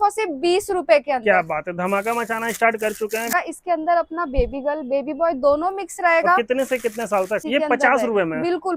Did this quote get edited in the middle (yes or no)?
yes